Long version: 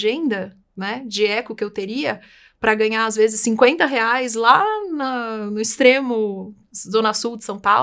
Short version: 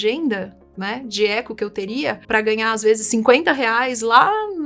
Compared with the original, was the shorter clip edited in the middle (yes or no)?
yes